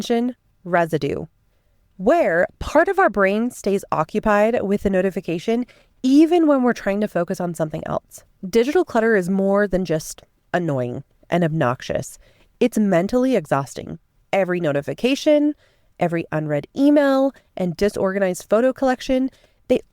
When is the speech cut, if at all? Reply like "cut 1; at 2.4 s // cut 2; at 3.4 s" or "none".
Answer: cut 1; at 8.4 s